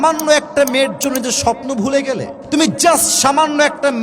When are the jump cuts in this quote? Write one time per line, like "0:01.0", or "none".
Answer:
0:02.3